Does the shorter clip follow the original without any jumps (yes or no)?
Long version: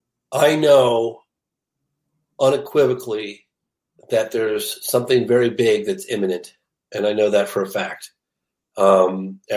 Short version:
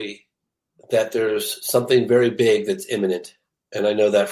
yes